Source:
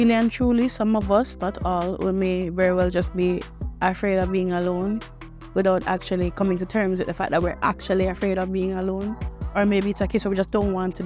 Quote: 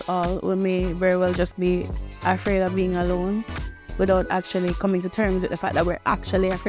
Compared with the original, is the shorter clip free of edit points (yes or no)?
yes